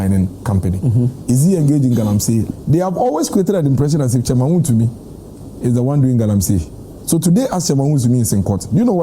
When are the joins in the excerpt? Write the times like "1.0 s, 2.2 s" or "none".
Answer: 2.5 s